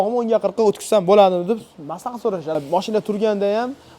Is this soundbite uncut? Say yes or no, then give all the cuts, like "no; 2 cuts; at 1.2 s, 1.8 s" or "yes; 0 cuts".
no; 1 cut; at 2.5 s